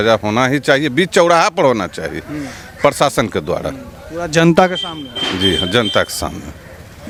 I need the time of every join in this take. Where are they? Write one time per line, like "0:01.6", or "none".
none